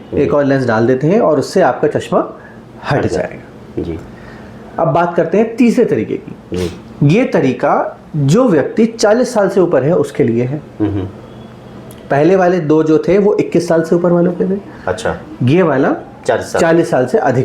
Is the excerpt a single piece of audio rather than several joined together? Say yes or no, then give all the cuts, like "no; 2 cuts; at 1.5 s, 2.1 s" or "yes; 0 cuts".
yes; 0 cuts